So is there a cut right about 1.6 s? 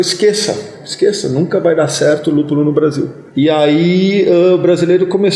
no; 1 cut; at 3.2 s

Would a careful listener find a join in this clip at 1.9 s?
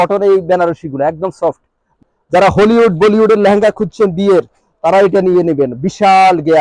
yes; 1 cut; at 1.9 s

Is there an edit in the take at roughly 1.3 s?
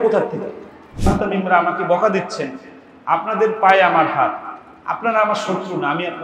yes; 1 cut; at 1.3 s

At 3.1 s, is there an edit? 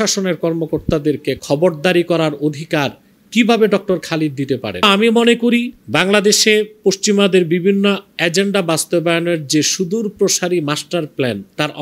no; 2 cuts; at 4.8 s, 5.8 s

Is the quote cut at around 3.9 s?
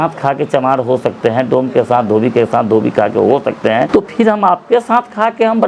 yes; 1 cut; at 3.9 s

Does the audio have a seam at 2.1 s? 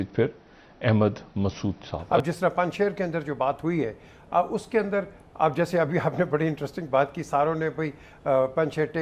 yes; 1 cut; at 2.1 s

